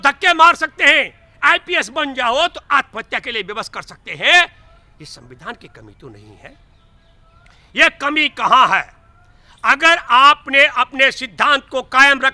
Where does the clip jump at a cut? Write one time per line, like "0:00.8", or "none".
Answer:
none